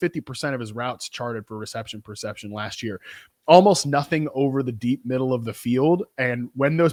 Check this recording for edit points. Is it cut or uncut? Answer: uncut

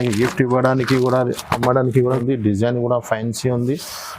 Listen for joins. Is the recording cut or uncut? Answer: cut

